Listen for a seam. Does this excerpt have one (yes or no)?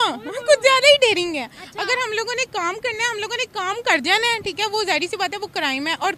no